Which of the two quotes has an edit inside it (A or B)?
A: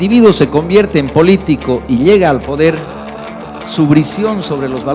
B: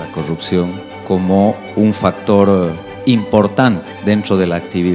B